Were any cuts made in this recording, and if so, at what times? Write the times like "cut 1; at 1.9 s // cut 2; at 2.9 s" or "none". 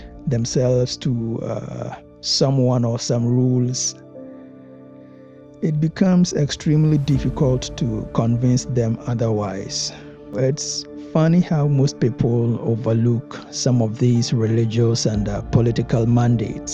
cut 1; at 10.3 s